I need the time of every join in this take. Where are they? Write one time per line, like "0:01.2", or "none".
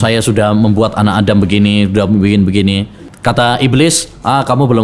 0:03.1